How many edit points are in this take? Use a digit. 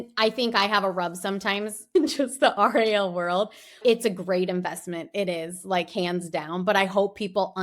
1